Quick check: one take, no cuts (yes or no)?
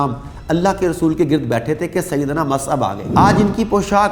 no